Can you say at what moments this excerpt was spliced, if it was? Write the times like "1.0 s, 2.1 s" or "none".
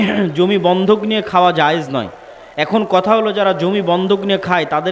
none